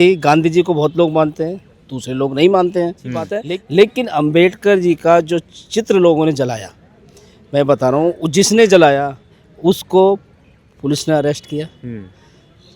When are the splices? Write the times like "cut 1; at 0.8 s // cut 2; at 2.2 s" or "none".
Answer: cut 1; at 3.4 s